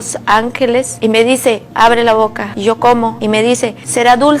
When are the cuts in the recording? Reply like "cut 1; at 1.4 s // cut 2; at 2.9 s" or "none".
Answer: cut 1; at 0.9 s // cut 2; at 2.5 s // cut 3; at 3.4 s